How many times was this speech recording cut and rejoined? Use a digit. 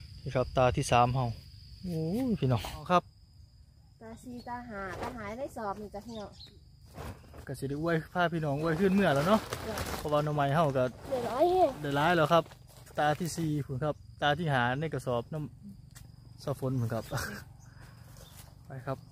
1